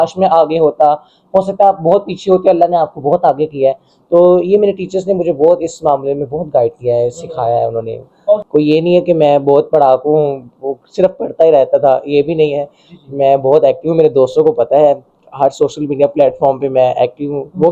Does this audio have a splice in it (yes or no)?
yes